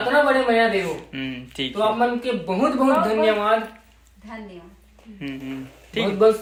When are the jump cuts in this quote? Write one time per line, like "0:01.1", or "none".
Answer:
none